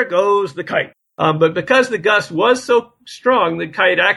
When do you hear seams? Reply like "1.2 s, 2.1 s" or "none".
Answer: 1.0 s